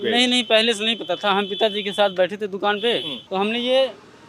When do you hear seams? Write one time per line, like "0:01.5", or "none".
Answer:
0:03.2